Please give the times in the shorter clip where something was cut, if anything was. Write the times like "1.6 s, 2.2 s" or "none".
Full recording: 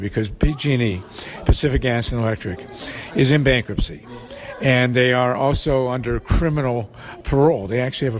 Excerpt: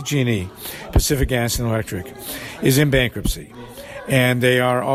none